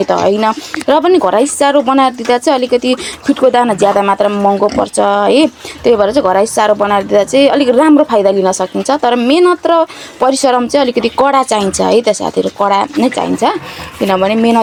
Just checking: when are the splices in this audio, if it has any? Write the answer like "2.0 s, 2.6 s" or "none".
none